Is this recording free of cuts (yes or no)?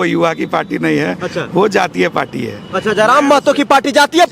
yes